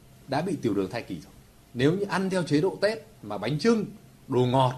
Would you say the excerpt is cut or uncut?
uncut